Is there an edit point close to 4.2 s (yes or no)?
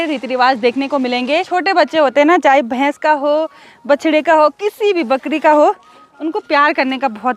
no